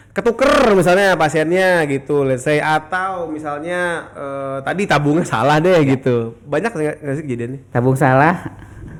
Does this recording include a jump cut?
no; 0 cuts

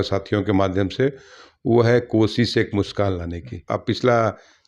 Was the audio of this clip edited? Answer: yes; 1 cut; at 3.7 s

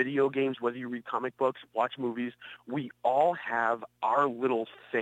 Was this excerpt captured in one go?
yes; 0 cuts

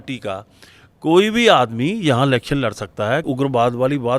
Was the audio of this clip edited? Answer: yes; 1 cut; at 3.2 s

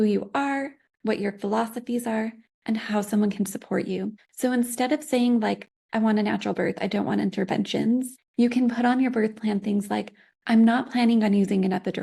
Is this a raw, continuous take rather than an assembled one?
no; 3 cuts; at 4.2 s, 5.7 s, 8.2 s

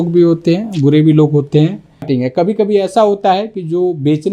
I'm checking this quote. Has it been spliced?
yes; 1 cut; at 2.1 s

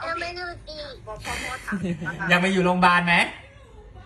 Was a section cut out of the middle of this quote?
no; 0 cuts

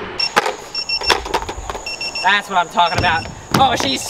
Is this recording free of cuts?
yes; 0 cuts

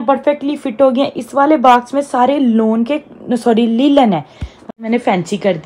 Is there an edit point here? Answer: yes; 1 cut; at 4.7 s

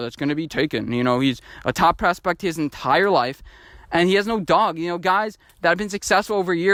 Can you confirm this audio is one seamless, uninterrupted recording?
yes; 0 cuts

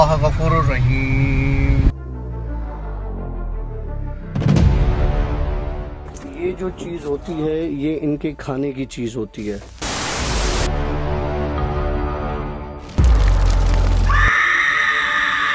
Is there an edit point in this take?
no; 0 cuts

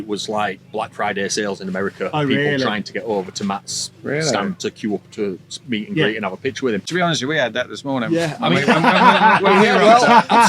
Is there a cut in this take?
yes; 1 cut; at 6.9 s

